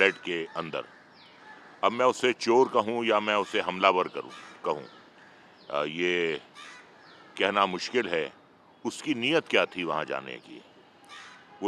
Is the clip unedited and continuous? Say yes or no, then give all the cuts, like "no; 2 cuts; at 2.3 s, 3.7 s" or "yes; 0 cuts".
yes; 0 cuts